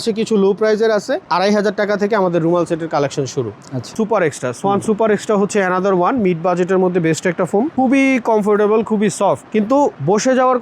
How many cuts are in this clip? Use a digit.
3